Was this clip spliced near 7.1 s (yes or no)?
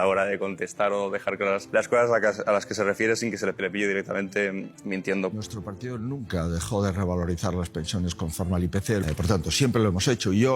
no